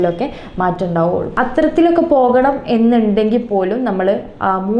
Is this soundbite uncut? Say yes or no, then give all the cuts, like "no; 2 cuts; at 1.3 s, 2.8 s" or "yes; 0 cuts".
no; 1 cut; at 1.3 s